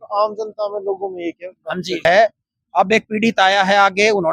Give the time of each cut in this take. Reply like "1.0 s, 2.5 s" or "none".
2.0 s